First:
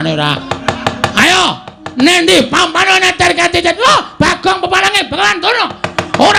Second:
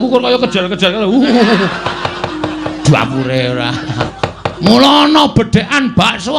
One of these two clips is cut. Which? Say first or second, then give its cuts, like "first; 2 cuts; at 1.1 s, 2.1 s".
second; 1 cut; at 4.0 s